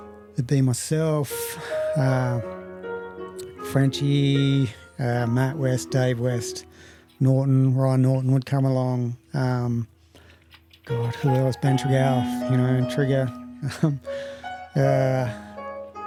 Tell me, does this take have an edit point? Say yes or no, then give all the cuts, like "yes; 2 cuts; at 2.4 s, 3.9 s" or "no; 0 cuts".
no; 0 cuts